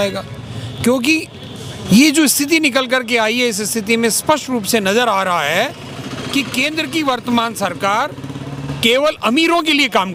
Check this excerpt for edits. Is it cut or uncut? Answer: uncut